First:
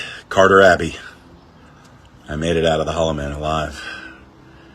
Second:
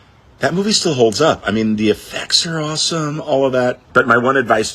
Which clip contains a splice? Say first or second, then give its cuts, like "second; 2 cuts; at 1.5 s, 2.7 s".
second; 1 cut; at 3.8 s